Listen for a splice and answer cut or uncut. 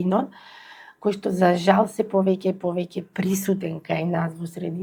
uncut